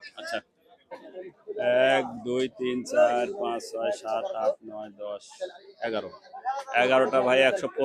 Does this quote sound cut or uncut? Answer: cut